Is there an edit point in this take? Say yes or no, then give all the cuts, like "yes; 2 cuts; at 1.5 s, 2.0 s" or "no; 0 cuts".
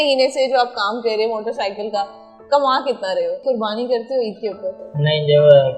yes; 1 cut; at 3.4 s